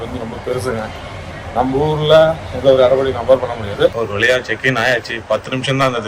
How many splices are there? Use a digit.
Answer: 1